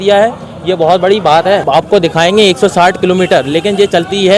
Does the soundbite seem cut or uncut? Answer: cut